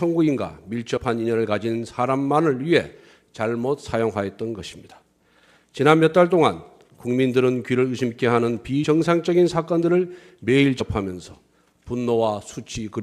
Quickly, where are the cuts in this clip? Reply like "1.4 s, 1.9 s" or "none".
3.8 s